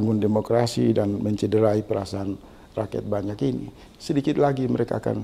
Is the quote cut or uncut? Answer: cut